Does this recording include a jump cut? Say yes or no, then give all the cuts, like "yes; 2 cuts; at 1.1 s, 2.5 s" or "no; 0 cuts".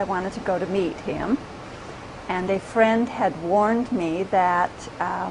no; 0 cuts